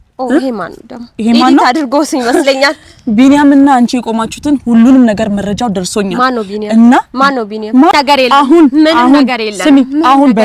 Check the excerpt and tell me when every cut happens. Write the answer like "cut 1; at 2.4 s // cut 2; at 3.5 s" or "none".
cut 1; at 7.9 s